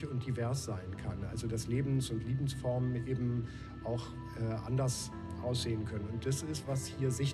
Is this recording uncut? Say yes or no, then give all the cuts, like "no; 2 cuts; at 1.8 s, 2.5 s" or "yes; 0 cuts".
yes; 0 cuts